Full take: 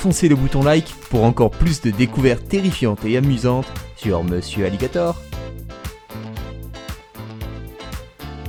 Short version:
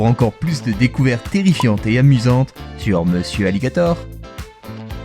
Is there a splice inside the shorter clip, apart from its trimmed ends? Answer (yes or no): yes